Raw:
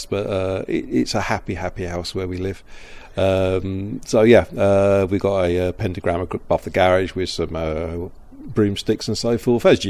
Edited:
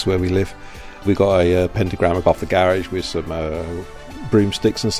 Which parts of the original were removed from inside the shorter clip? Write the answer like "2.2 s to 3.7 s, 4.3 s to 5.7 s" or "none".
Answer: 3.1 s to 5.1 s, 6.2 s to 6.4 s